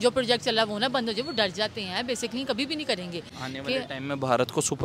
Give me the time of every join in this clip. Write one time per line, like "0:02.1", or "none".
0:03.3